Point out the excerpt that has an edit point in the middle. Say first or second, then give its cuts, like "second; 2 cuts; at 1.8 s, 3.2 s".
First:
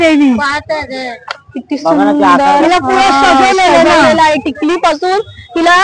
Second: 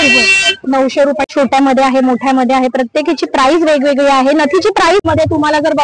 second; 2 cuts; at 1.3 s, 5.1 s